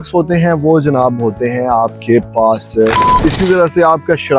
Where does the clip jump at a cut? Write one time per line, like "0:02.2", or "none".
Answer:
0:03.0